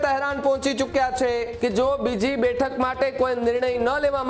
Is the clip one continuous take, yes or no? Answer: no